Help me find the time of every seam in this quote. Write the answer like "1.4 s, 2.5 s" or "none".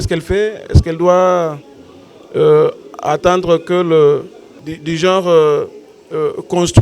4.6 s